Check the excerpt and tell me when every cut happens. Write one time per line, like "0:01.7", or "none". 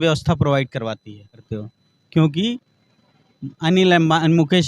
0:01.5